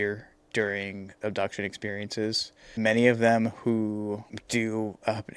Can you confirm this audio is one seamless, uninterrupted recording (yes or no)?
no